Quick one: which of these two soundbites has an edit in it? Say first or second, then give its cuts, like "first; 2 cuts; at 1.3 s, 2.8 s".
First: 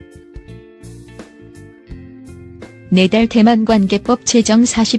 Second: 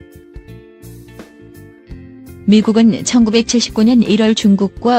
first; 1 cut; at 2.5 s